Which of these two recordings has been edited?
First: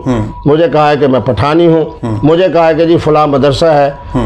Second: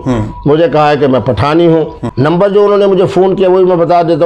second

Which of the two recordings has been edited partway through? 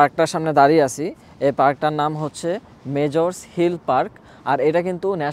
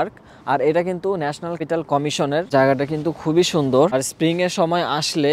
second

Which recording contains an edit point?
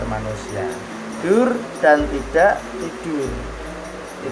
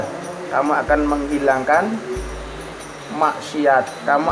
first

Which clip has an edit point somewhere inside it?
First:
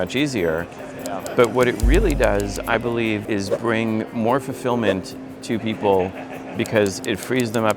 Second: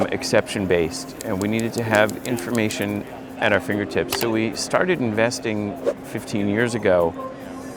first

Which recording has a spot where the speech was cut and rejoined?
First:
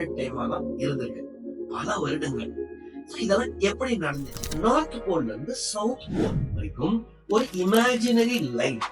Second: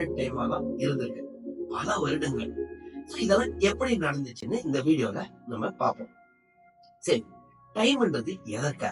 first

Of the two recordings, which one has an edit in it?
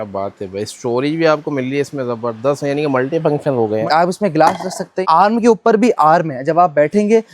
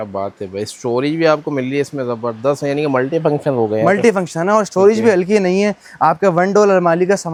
first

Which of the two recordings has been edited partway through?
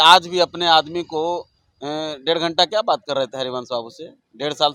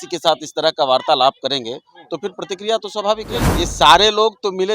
second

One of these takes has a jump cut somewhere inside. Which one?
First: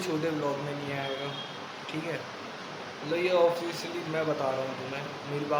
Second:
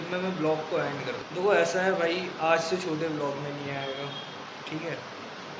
second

